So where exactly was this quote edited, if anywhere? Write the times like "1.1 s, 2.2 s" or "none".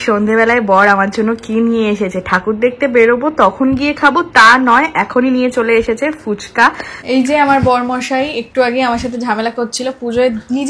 6.9 s